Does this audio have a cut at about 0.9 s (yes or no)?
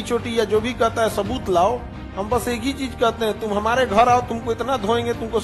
no